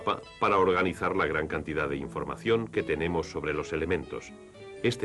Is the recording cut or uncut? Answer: cut